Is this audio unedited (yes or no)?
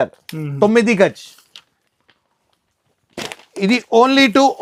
yes